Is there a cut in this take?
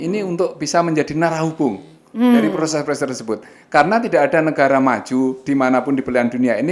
no; 0 cuts

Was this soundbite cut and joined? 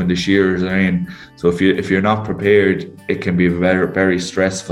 no; 0 cuts

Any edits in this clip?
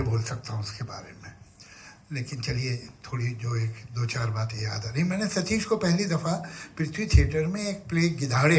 no; 0 cuts

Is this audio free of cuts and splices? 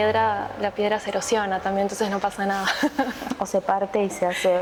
yes; 0 cuts

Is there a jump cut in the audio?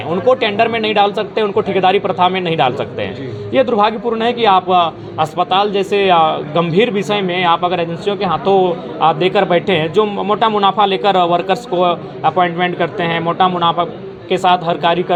no; 0 cuts

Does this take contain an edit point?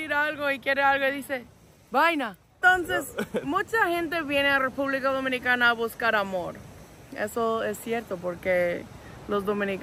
yes; 1 cut; at 2.6 s

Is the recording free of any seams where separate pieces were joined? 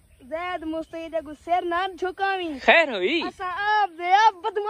yes; 0 cuts

